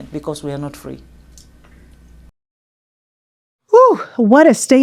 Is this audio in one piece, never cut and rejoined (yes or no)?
yes